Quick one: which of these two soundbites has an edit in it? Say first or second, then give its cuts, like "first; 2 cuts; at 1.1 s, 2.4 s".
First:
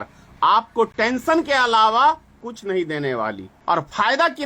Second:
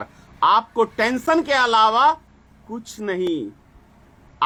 first; 2 cuts; at 2.5 s, 3.5 s